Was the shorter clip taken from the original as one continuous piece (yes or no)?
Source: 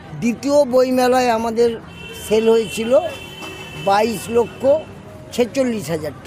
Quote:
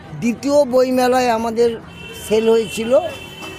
yes